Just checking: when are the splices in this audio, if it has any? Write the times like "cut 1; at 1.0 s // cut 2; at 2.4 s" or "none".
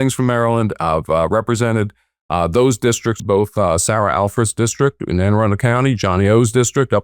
cut 1; at 3.2 s